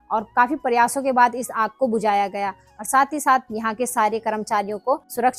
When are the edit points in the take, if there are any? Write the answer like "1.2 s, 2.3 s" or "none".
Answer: none